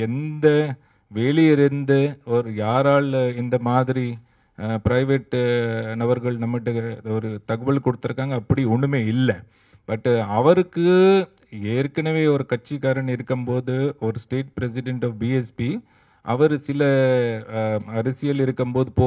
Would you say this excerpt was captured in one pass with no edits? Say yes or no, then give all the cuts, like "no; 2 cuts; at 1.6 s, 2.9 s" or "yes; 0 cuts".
yes; 0 cuts